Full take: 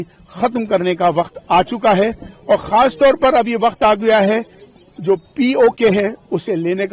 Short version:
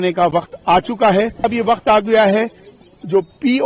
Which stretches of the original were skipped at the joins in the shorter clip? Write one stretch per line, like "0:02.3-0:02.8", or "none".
0:02.3-0:03.4

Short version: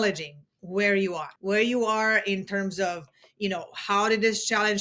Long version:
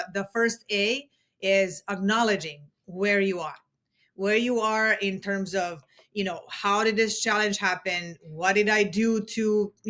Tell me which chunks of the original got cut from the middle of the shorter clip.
0:03.5-0:04.0

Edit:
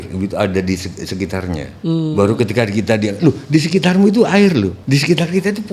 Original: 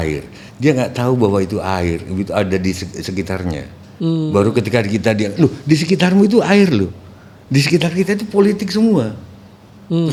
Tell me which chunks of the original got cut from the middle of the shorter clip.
0:03.7-0:03.9
0:06.9-0:07.4

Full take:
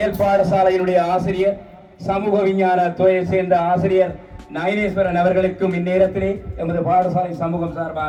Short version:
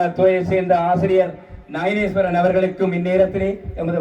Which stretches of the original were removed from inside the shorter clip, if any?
none

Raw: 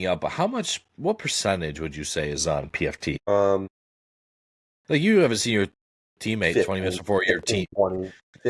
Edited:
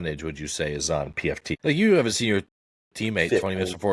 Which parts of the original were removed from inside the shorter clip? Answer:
0:03.1-0:04.7

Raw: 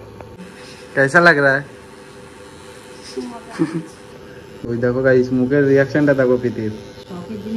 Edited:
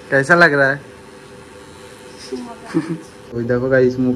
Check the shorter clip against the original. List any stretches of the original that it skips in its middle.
0:04.0-0:04.5

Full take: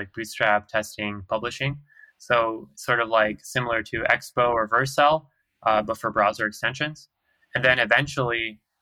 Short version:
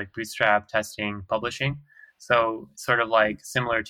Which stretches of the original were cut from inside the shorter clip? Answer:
none

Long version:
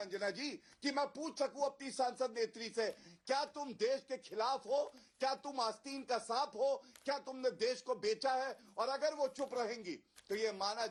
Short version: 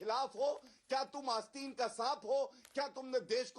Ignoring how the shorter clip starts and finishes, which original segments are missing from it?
none

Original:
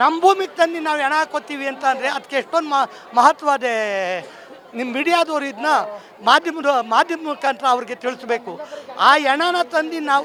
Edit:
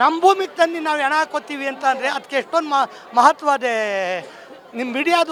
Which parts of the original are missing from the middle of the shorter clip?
none

